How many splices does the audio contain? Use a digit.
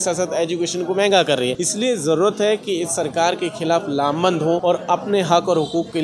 2